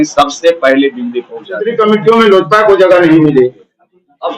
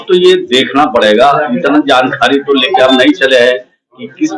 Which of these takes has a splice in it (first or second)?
first